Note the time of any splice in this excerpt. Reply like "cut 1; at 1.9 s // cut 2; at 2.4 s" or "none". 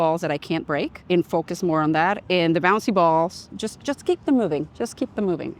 cut 1; at 1.0 s // cut 2; at 4.7 s